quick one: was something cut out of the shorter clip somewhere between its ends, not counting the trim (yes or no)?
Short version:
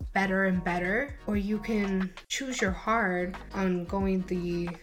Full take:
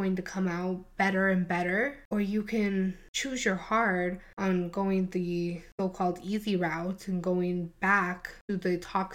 no